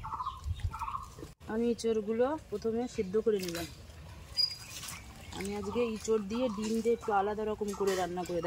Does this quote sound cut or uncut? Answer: cut